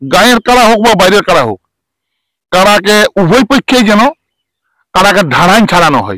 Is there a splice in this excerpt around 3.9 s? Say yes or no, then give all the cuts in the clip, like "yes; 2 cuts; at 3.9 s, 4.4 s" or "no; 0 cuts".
no; 0 cuts